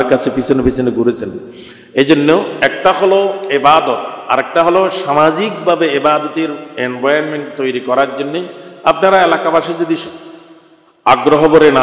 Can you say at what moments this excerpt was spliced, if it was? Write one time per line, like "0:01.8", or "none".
none